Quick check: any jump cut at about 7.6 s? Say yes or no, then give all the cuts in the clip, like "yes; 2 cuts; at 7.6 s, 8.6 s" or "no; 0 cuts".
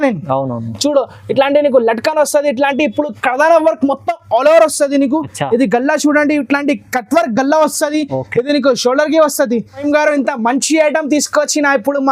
no; 1 cut; at 9.7 s